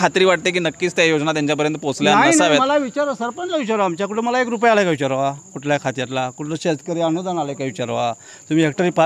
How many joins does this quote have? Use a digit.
0